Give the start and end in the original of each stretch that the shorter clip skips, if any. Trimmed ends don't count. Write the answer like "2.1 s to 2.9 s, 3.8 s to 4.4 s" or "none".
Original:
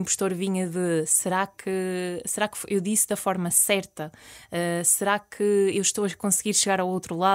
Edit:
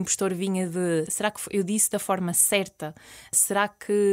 1.1 s to 2.3 s, 4.5 s to 4.8 s